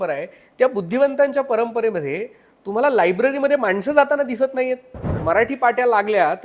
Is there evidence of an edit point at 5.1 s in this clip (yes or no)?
yes